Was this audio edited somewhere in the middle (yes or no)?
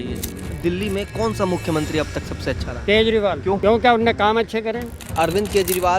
yes